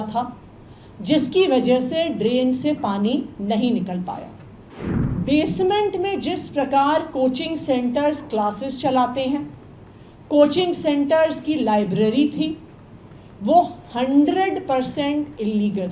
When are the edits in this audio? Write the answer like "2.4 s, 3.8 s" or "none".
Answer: 5.0 s